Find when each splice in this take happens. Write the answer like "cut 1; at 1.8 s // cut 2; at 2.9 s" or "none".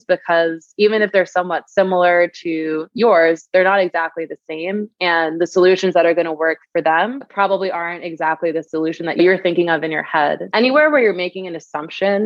cut 1; at 9.2 s // cut 2; at 10.4 s